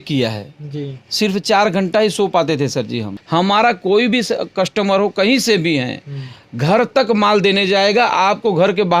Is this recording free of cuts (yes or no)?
no